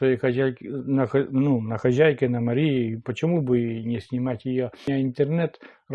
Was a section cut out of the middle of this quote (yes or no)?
yes